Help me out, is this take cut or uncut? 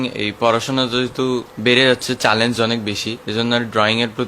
cut